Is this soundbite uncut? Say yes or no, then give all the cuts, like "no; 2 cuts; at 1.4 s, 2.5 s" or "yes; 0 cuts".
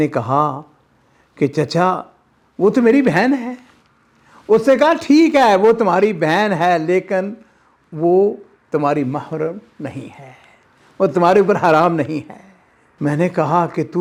yes; 0 cuts